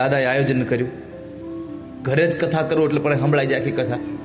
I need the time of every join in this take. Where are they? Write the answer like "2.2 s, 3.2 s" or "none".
1.8 s